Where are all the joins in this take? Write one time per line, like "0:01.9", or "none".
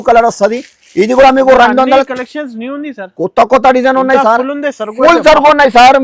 none